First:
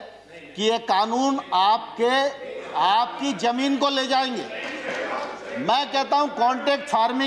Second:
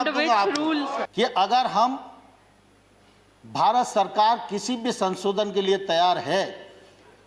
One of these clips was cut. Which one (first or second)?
second